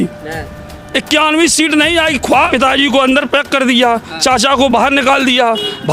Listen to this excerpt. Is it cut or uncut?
cut